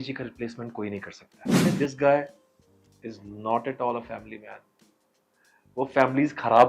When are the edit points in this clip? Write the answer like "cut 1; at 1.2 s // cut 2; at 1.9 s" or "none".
cut 1; at 1.7 s